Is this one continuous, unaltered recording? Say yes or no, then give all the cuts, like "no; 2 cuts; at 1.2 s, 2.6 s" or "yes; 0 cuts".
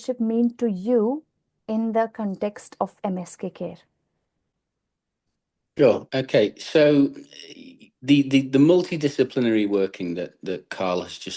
yes; 0 cuts